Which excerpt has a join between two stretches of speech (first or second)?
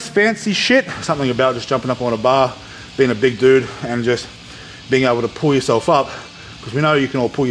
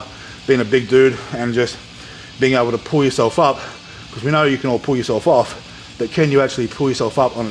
first